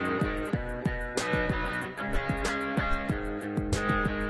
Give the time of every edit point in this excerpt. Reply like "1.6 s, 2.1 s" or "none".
none